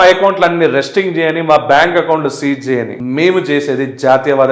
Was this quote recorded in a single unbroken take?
yes; 0 cuts

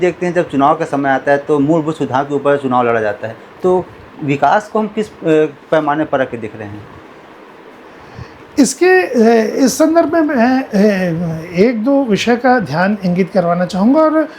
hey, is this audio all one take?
yes; 0 cuts

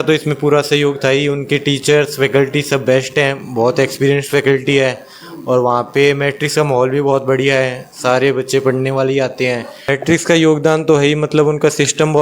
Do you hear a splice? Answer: yes; 1 cut; at 9.9 s

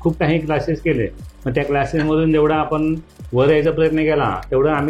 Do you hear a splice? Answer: no; 0 cuts

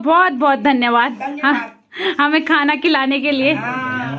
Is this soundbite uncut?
yes; 0 cuts

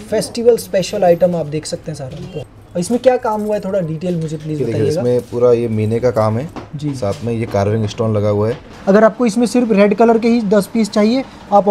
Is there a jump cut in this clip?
yes; 2 cuts; at 2.3 s, 8.7 s

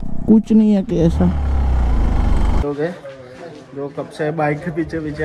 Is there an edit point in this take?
yes; 1 cut; at 2.6 s

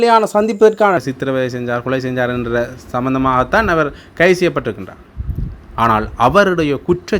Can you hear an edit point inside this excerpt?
yes; 1 cut; at 1.0 s

